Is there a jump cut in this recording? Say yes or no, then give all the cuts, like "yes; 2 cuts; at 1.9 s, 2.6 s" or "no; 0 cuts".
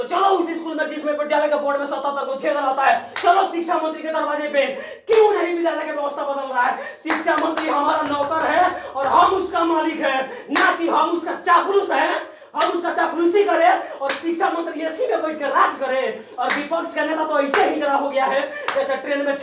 no; 0 cuts